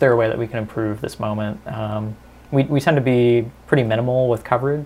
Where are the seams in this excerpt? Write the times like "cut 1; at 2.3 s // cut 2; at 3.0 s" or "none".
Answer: none